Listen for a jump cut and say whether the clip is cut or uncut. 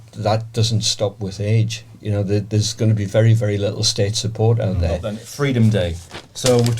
cut